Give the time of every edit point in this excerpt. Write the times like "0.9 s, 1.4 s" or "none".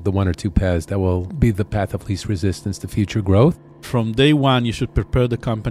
1.3 s, 3.9 s